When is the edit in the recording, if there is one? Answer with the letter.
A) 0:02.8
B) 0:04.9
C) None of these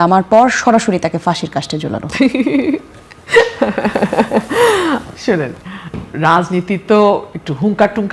C